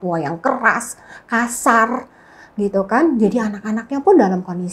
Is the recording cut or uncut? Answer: uncut